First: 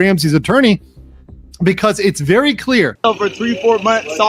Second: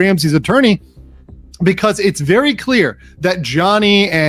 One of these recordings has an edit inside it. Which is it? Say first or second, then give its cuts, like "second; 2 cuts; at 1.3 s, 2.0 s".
first; 1 cut; at 2.9 s